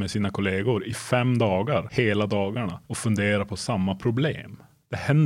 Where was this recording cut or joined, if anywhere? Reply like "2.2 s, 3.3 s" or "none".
1.9 s, 2.8 s